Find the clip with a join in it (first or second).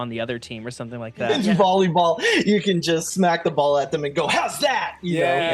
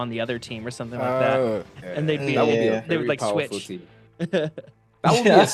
first